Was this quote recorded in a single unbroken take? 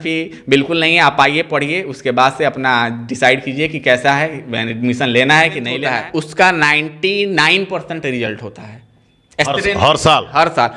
no; 1 cut; at 5.8 s

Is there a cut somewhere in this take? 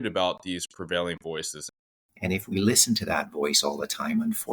yes; 1 cut; at 2.1 s

